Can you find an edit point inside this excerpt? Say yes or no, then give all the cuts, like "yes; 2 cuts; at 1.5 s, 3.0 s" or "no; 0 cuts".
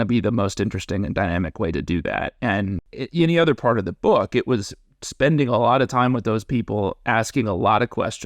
yes; 1 cut; at 2.9 s